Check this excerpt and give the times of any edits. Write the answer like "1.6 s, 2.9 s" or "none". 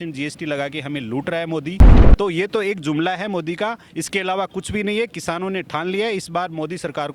2.0 s